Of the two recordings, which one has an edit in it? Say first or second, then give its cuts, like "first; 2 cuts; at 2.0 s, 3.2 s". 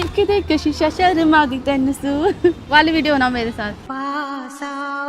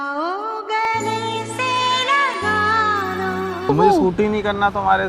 second; 1 cut; at 3.7 s